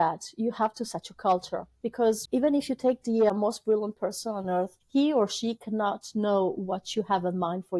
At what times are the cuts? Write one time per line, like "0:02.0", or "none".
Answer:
0:02.2
0:03.3
0:04.8

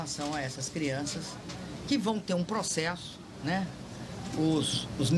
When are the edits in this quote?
0:02.2

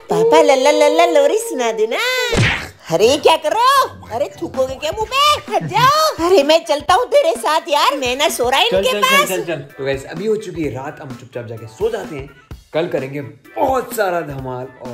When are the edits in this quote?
none

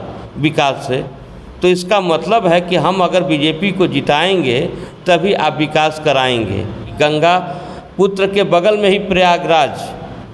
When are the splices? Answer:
0:06.9

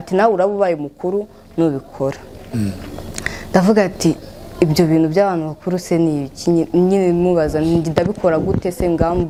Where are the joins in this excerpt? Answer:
none

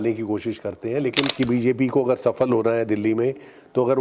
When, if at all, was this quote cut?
0:01.3

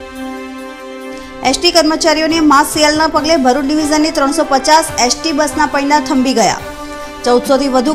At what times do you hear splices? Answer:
0:00.9

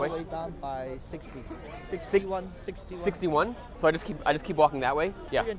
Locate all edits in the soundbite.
0:03.7

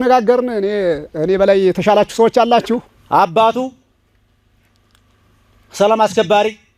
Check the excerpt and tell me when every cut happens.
0:02.9

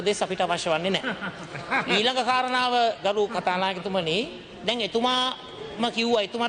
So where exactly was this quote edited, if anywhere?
none

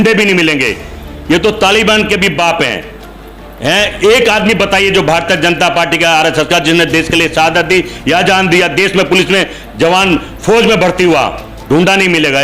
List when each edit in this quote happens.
none

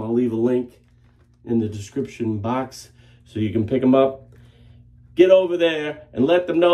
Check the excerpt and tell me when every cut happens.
none

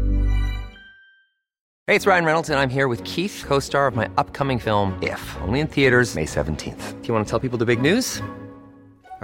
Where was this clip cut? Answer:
0:01.7

